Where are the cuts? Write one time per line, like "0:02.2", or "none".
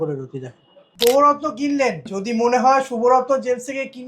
0:00.9
0:02.1

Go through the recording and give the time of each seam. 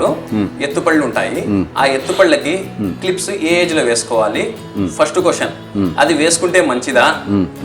none

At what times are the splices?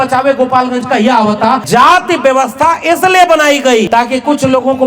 0:01.6
0:03.9

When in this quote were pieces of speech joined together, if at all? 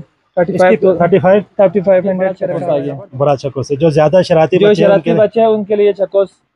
0:02.5

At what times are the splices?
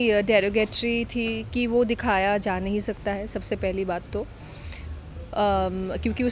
none

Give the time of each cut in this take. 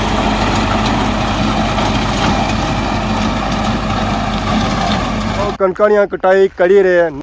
none

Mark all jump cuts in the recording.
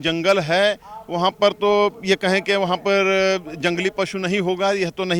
none

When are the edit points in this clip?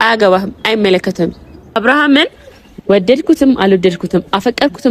0:01.7

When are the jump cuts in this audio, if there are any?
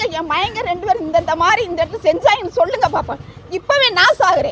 none

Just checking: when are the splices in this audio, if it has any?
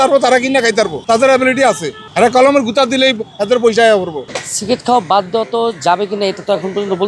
0:04.2

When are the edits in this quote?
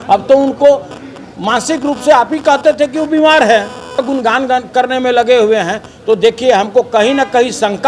0:04.0

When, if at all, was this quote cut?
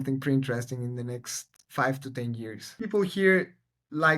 0:02.7

